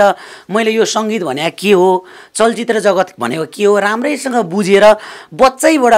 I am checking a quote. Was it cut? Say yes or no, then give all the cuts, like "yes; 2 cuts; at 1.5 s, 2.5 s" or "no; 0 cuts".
no; 0 cuts